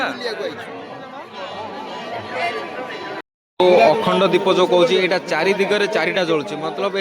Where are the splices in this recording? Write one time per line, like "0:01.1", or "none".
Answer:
0:03.3